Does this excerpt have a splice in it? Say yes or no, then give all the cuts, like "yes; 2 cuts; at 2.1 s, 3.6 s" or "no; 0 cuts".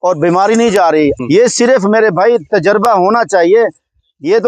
yes; 1 cut; at 1.2 s